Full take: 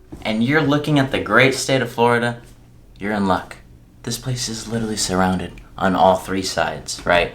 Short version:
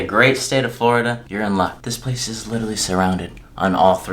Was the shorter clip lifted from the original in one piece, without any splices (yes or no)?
no